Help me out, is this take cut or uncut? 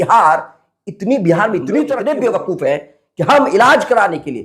cut